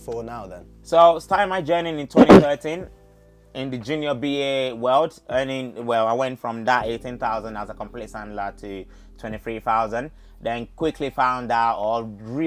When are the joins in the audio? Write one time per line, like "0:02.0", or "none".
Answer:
none

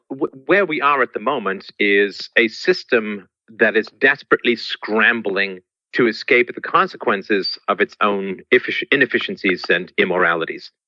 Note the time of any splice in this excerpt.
0:08.7

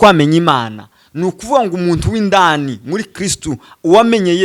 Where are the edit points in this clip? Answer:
none

